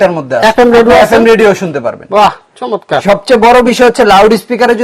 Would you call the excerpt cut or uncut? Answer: uncut